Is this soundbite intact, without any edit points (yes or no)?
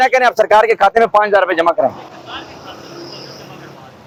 yes